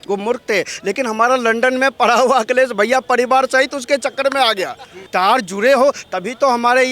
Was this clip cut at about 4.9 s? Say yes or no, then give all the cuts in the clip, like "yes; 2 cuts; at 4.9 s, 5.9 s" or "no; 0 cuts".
yes; 1 cut; at 4.9 s